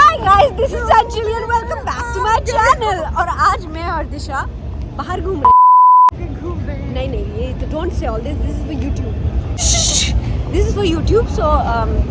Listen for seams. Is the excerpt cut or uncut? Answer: uncut